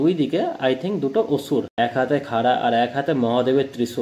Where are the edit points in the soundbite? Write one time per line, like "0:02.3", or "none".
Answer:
0:01.7